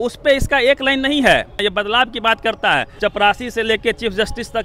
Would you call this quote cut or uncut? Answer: cut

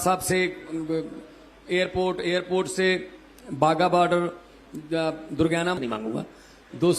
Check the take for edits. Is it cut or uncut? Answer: cut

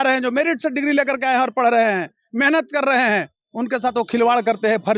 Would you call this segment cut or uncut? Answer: uncut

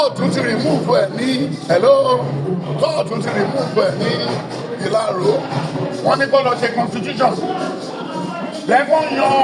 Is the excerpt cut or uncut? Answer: uncut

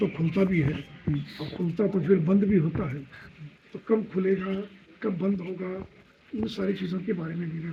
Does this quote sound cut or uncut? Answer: uncut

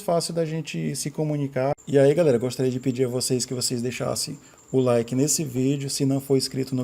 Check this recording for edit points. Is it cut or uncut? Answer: cut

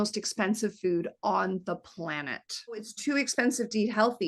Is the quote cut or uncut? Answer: cut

